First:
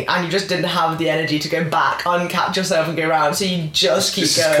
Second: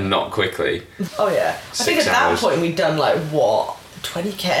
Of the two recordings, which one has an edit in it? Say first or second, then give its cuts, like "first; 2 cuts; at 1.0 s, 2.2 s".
second; 1 cut; at 1.0 s